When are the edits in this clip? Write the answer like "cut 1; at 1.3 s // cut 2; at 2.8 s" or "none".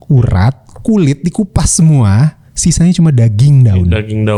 none